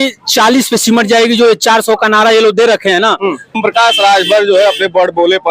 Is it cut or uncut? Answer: cut